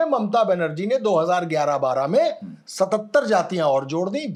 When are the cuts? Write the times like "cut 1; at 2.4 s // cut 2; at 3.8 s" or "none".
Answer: none